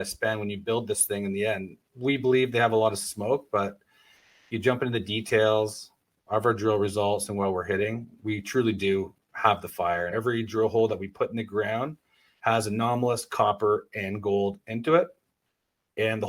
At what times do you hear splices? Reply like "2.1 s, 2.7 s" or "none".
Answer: 1.8 s, 10.1 s